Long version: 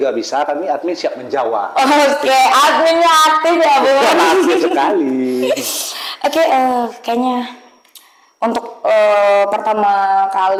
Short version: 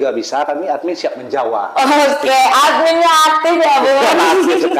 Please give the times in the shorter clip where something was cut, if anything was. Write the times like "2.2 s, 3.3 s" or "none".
none